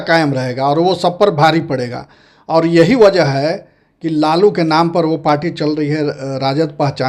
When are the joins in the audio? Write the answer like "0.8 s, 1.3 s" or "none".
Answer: none